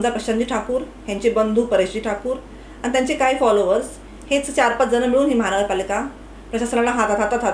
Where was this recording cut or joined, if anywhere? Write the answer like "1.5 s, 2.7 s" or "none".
none